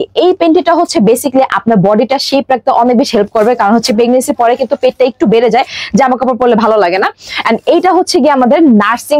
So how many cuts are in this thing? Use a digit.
0